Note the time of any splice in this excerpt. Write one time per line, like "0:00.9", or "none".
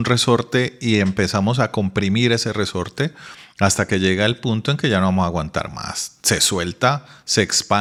none